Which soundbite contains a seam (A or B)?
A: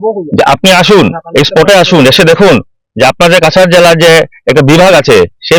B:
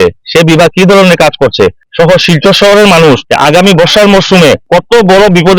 B